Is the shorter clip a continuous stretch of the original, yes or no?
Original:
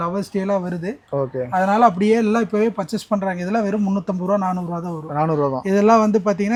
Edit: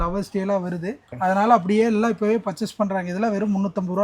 no